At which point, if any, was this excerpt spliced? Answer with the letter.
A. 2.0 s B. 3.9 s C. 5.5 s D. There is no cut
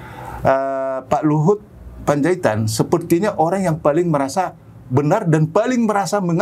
D